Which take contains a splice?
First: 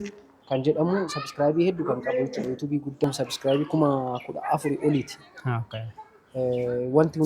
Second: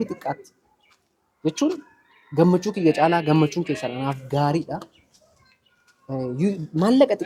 first; 1 cut; at 3.0 s

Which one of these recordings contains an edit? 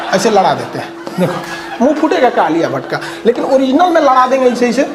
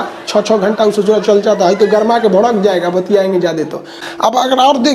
second; 1 cut; at 4.0 s

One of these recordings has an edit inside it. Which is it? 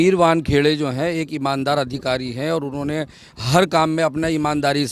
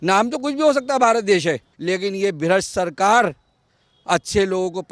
second; 1 cut; at 1.7 s

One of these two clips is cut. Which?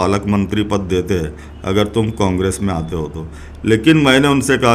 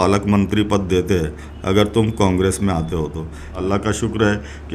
second; 1 cut; at 3.6 s

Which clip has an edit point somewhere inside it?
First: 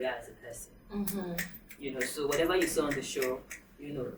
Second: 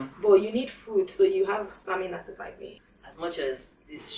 second; 1 cut; at 2.7 s

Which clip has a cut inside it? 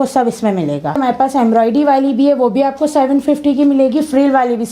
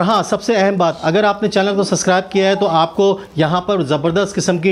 first; 1 cut; at 1.0 s

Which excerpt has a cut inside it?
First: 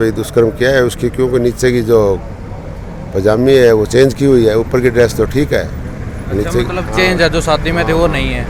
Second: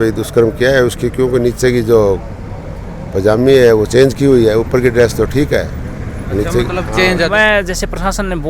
second; 1 cut; at 7.3 s

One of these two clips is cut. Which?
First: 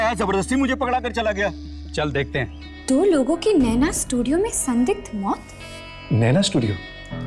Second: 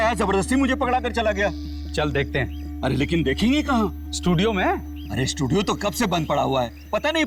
first; 2 cuts; at 2.6 s, 6.0 s

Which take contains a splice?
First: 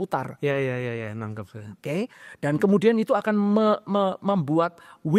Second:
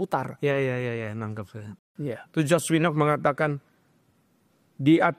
second; 1 cut; at 1.7 s

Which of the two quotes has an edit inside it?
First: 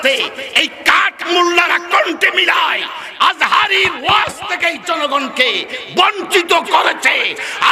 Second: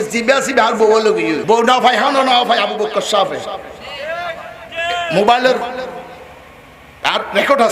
second; 1 cut; at 1.4 s

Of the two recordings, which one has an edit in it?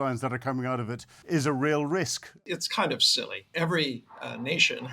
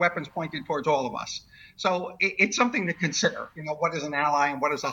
first; 3 cuts; at 1.1 s, 2.4 s, 3.5 s

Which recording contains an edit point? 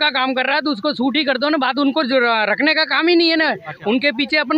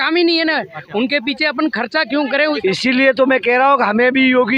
second; 1 cut; at 2.6 s

